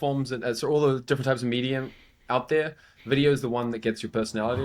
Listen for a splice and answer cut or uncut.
uncut